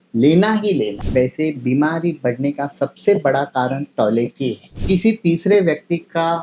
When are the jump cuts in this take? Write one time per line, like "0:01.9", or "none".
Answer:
0:01.0
0:04.7